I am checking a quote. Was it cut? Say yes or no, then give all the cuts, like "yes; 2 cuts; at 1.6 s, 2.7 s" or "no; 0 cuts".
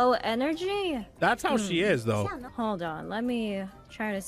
yes; 2 cuts; at 1.1 s, 2.4 s